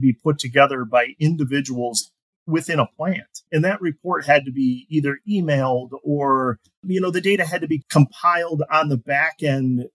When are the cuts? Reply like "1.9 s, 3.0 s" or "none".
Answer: 3.4 s, 6.8 s, 7.8 s